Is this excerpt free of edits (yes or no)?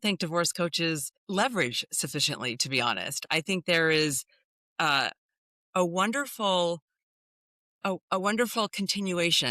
no